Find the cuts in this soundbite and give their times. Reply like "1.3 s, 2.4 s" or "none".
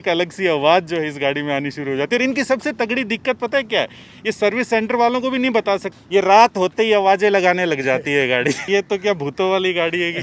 5.9 s, 8.6 s